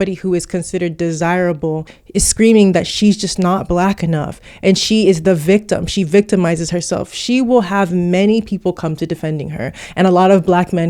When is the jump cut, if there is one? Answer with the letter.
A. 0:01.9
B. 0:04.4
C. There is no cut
A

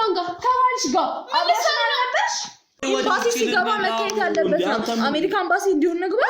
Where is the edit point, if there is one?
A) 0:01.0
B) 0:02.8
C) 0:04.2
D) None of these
B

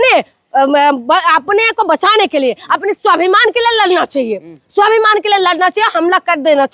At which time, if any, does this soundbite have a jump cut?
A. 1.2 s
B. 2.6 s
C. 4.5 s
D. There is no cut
D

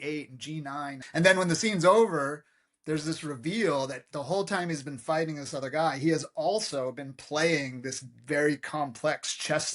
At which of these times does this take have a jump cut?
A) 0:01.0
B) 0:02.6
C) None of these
A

